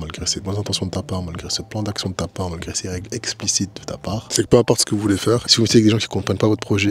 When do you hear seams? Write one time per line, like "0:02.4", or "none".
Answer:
0:04.3
0:05.5